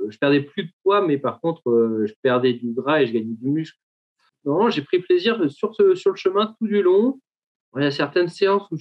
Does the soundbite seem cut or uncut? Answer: cut